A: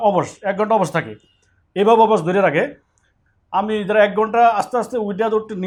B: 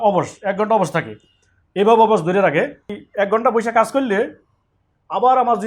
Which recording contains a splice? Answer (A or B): B